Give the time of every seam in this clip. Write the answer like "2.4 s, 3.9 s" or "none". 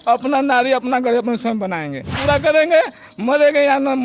2.1 s